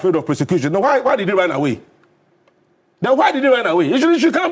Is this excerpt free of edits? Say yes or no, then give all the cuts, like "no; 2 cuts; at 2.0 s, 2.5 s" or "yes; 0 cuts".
yes; 0 cuts